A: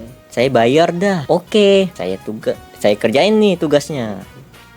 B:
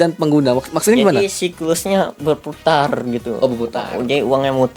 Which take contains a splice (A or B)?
A